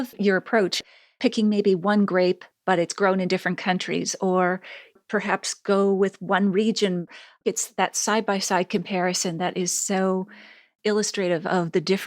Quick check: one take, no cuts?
no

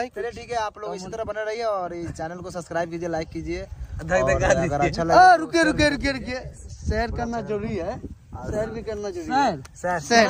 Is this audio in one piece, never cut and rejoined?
yes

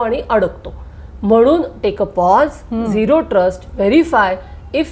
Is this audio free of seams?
yes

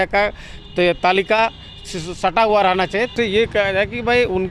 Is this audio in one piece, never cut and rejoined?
no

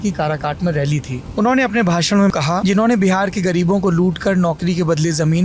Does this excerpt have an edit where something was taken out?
yes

